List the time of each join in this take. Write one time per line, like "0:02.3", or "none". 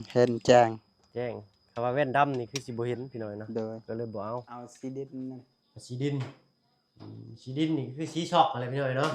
0:04.6